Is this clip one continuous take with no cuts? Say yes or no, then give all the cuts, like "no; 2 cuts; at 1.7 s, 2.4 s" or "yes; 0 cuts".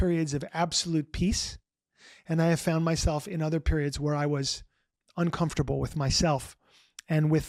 yes; 0 cuts